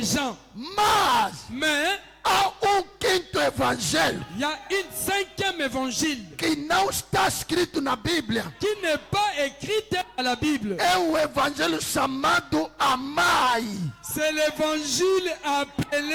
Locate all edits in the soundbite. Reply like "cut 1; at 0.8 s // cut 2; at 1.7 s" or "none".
none

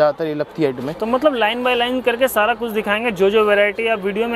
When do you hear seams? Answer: none

